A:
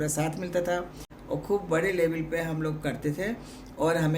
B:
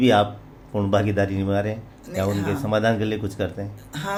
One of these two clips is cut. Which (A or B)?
A